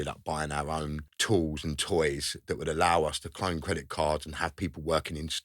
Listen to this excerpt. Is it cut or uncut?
cut